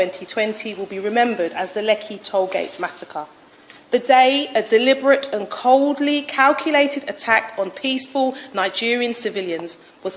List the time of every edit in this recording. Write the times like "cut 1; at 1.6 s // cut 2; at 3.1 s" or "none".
none